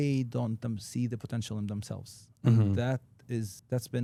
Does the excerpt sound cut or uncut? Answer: uncut